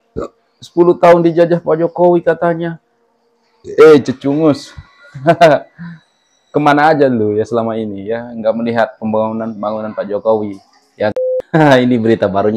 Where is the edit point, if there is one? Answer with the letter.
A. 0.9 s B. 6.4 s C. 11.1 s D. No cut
C